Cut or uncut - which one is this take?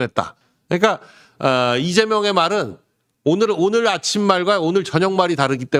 uncut